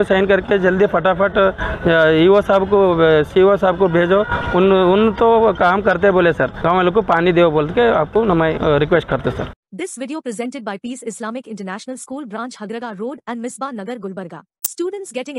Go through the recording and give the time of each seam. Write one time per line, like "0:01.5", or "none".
0:06.5
0:08.6
0:09.4